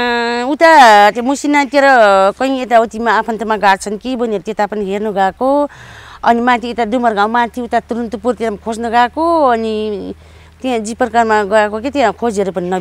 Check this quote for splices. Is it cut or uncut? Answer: uncut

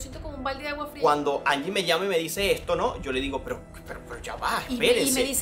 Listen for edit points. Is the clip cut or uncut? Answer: cut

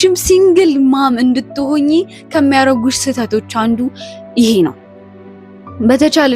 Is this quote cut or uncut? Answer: uncut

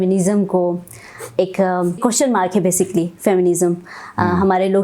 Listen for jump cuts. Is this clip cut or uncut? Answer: cut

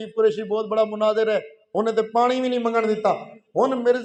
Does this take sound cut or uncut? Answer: uncut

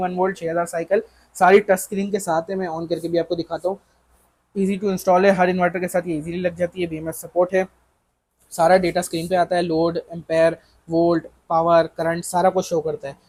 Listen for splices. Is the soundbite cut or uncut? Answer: uncut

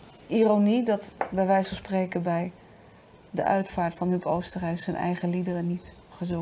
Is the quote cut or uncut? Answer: uncut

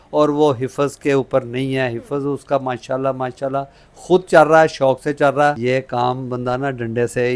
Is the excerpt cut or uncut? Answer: cut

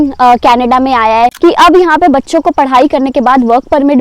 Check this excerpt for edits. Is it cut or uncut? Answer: cut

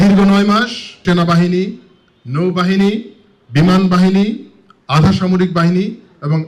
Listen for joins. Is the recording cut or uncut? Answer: cut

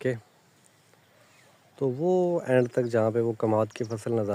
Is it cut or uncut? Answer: uncut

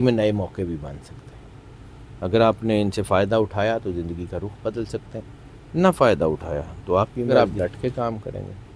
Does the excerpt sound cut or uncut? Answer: cut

